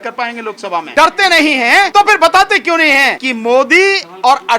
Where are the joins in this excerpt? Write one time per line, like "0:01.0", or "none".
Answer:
0:00.9
0:01.9
0:03.2